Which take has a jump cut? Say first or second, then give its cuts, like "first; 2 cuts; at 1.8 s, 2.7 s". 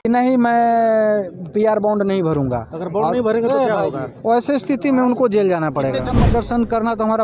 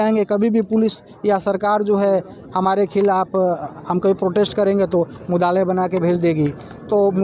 first; 1 cut; at 6.2 s